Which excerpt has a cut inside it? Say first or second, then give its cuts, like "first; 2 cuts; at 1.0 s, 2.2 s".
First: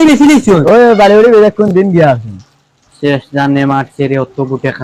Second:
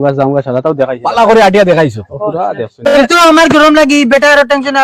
second; 1 cut; at 2.9 s